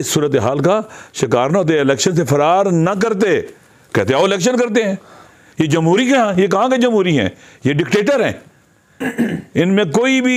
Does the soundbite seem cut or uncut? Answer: uncut